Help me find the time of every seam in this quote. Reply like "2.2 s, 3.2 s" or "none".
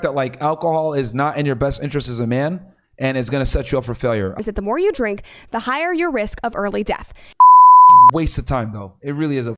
4.4 s, 7.1 s